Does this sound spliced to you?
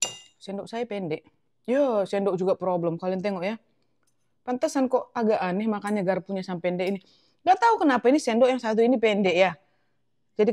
no; 0 cuts

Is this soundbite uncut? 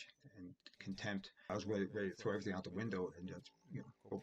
no; 1 cut; at 1.5 s

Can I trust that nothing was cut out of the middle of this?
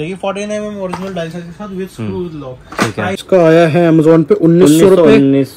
no; 1 cut; at 3.2 s

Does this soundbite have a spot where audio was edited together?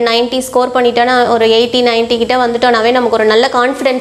no; 0 cuts

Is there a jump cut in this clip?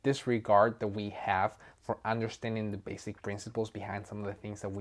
no; 0 cuts

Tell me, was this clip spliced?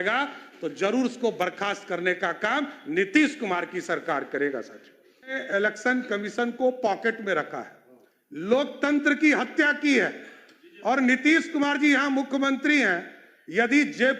yes; 1 cut; at 5.4 s

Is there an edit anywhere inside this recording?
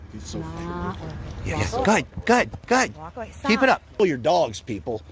yes; 1 cut; at 4.0 s

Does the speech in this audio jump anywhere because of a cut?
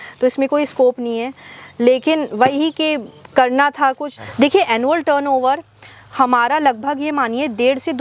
yes; 1 cut; at 4.2 s

